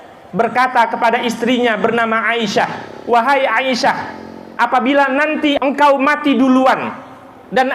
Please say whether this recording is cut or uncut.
cut